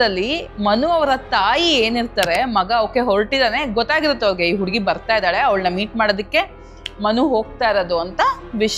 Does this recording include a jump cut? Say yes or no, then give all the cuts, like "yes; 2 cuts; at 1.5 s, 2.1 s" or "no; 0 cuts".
no; 0 cuts